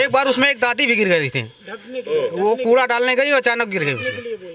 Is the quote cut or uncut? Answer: uncut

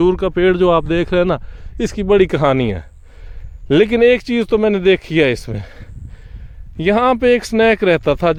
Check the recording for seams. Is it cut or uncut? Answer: uncut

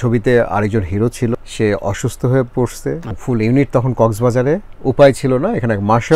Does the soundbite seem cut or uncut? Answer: cut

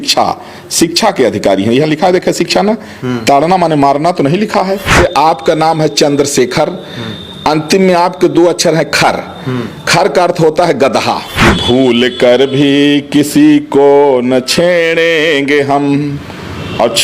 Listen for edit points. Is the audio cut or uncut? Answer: cut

